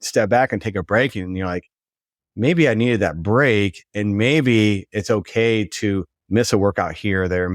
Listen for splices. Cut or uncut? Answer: uncut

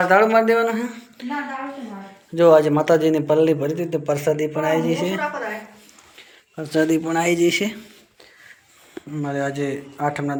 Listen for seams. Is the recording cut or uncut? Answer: uncut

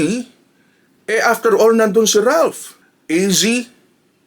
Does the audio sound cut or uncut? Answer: cut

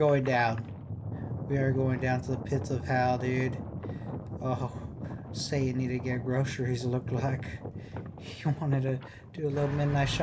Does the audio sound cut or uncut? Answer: uncut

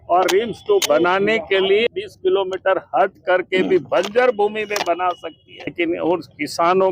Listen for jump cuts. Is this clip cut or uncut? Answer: cut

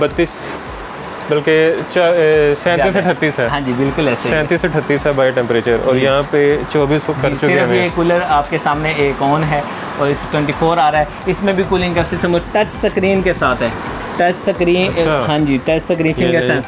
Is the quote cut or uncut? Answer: uncut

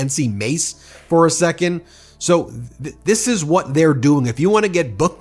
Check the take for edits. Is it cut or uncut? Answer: uncut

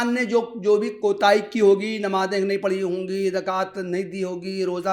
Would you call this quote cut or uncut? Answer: uncut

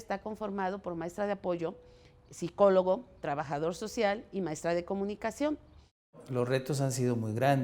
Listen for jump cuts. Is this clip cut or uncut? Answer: cut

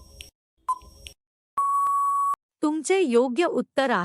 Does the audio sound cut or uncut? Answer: cut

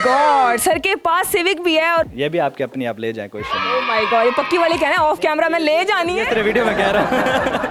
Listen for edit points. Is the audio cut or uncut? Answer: uncut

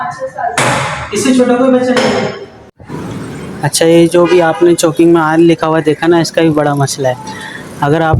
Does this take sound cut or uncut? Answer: cut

